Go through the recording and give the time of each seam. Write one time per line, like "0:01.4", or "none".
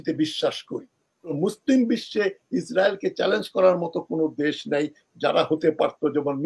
0:01.4